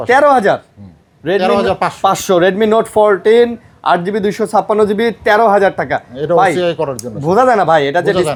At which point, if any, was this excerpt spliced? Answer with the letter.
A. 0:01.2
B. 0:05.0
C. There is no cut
C